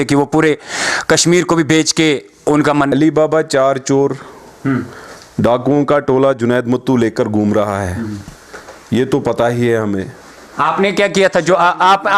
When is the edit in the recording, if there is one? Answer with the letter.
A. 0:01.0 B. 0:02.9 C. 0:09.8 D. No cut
B